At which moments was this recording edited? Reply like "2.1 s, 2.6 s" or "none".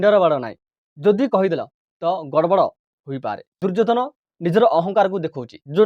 3.5 s